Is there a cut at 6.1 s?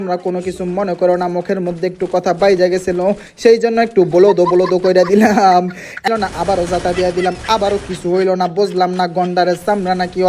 yes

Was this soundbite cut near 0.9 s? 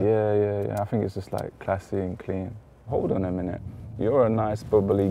no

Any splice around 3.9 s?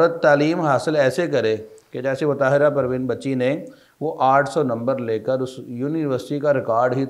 no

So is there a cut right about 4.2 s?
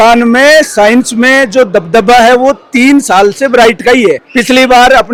no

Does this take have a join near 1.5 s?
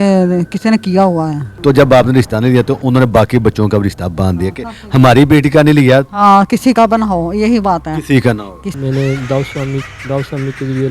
yes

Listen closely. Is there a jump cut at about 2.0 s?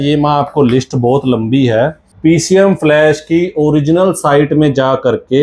yes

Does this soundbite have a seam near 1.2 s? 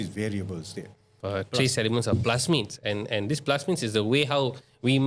yes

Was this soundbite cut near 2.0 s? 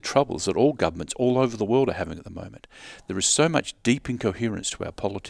no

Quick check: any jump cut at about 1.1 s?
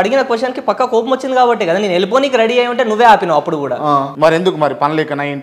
no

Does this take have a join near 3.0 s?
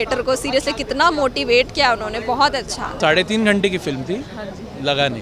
yes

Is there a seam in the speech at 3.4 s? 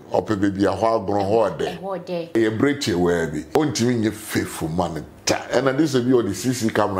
yes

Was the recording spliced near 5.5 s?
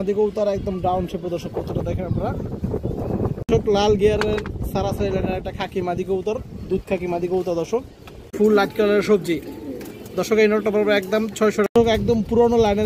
no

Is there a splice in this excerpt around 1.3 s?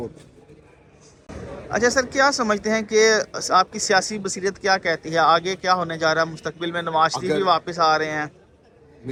no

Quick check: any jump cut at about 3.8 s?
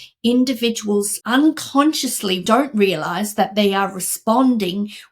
no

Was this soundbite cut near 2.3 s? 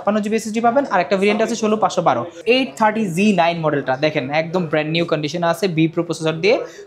yes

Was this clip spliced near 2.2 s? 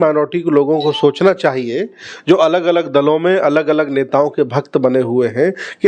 no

